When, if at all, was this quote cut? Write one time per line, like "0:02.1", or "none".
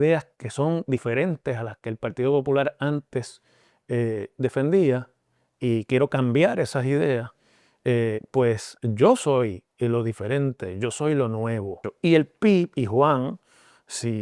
0:11.9